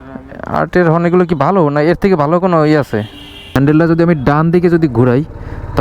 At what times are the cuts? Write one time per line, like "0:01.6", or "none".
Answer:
0:03.5